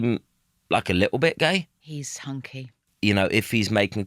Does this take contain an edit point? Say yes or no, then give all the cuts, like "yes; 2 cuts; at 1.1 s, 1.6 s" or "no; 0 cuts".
yes; 1 cut; at 2.8 s